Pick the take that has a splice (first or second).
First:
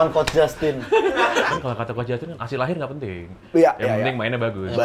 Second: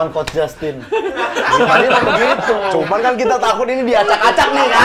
first